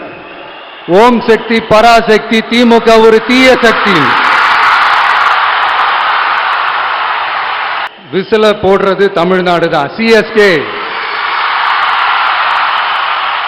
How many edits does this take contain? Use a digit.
1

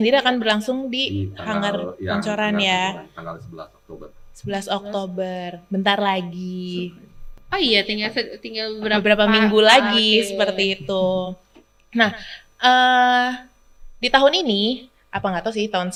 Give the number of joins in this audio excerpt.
0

